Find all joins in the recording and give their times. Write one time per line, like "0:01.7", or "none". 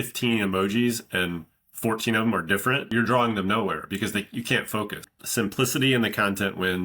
0:02.9
0:05.0